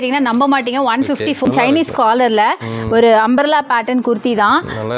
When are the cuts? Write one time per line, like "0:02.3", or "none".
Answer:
0:01.5